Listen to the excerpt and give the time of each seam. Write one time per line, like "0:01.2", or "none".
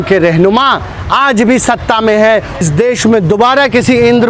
0:02.6